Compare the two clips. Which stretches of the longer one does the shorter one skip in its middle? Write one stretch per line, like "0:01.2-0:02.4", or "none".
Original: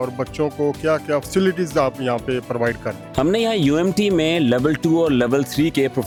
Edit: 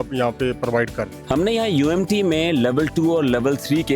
none